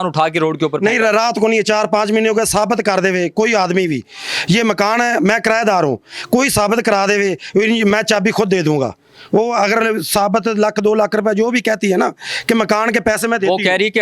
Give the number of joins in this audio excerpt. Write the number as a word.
zero